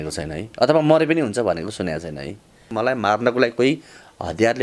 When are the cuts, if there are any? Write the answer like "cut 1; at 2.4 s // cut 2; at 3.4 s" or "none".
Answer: cut 1; at 2.7 s